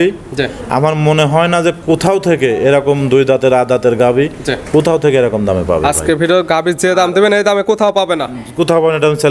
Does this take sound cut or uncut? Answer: uncut